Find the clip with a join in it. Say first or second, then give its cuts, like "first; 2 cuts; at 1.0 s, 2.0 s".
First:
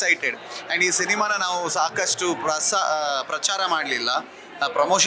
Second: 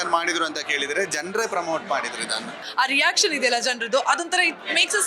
second; 1 cut; at 2.6 s